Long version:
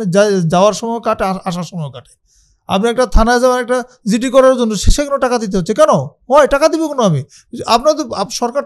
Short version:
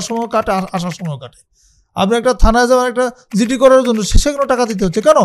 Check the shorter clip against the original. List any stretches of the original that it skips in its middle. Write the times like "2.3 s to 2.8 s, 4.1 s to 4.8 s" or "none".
none